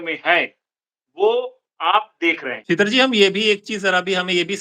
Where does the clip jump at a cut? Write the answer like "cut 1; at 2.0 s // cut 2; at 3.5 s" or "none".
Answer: cut 1; at 2.5 s